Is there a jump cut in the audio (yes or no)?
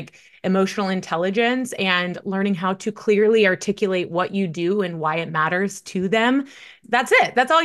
yes